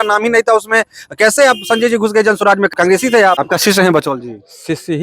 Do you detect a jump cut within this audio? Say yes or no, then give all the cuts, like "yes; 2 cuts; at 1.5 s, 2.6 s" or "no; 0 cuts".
yes; 2 cuts; at 2.7 s, 3.4 s